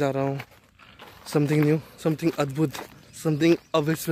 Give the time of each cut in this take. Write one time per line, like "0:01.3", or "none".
none